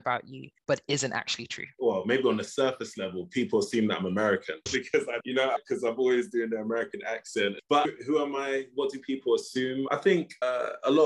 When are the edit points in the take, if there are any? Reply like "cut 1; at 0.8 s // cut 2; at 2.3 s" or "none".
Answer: cut 1; at 5.2 s // cut 2; at 7.6 s // cut 3; at 9.9 s